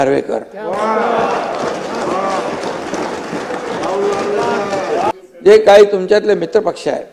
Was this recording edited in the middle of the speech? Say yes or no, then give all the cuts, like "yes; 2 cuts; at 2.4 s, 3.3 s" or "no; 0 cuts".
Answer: yes; 1 cut; at 5.1 s